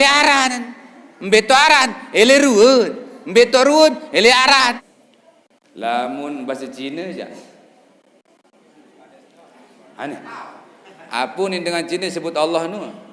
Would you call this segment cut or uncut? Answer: cut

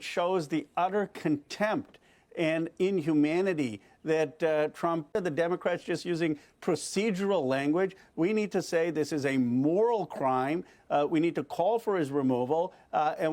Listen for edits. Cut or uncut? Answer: cut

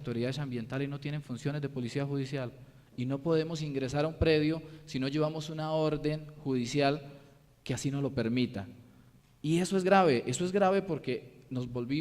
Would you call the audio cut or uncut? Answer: cut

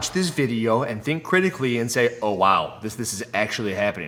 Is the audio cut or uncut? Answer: uncut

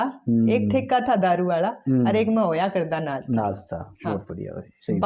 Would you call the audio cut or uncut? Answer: uncut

